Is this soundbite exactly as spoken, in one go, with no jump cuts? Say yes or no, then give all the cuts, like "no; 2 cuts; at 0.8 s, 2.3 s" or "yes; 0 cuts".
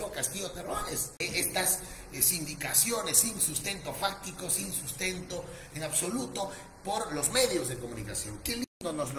no; 1 cut; at 1.2 s